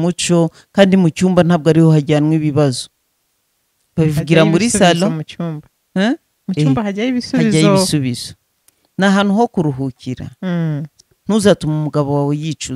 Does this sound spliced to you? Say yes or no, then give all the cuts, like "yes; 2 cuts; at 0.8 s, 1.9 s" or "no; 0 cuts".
yes; 1 cut; at 10.9 s